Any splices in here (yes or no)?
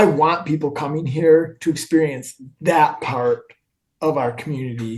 no